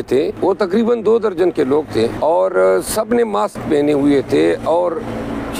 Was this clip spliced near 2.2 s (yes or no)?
yes